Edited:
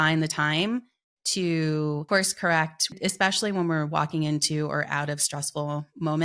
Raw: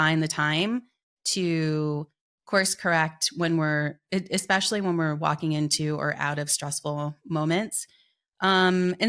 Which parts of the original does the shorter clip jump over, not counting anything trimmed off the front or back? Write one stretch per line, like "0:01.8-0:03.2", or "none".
0:02.0-0:02.4
0:03.4-0:04.2